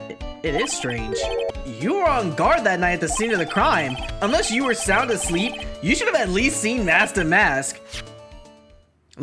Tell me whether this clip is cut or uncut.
cut